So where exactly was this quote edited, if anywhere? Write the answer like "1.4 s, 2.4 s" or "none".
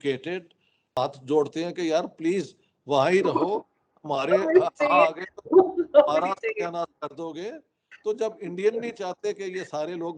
1.0 s

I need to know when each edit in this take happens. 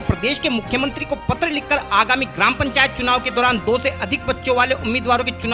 none

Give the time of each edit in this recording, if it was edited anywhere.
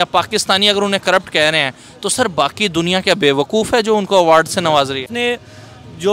5.1 s

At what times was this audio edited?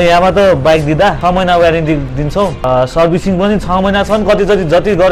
1.2 s, 2.6 s

